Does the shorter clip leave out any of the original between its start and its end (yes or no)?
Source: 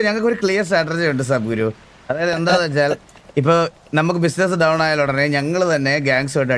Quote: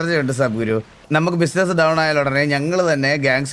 yes